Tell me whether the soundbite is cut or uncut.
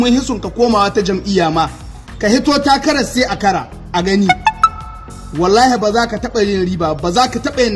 uncut